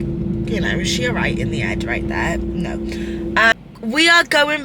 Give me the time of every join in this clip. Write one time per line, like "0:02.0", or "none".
none